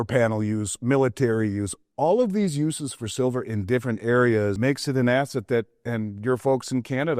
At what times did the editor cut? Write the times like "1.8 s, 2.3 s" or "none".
4.6 s